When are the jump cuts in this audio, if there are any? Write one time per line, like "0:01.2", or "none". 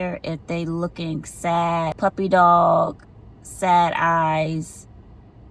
0:02.0